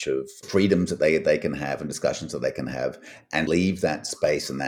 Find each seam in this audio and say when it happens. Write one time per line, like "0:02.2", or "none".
none